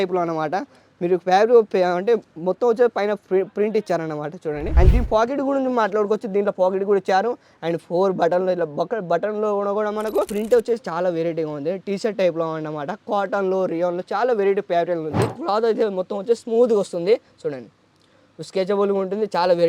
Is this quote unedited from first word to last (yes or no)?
no